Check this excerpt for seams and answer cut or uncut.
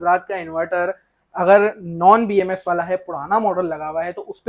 uncut